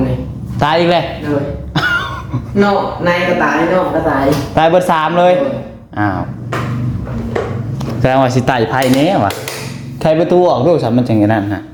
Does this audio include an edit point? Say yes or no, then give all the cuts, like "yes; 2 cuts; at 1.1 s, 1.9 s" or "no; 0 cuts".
no; 0 cuts